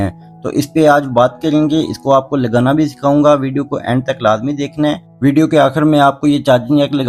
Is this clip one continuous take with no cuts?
yes; 0 cuts

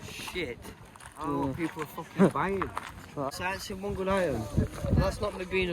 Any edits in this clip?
yes; 1 cut; at 3.3 s

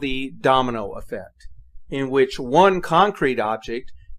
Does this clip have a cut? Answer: yes; 1 cut; at 2.3 s

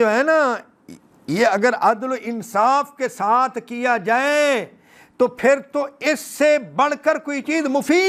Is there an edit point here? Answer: no; 0 cuts

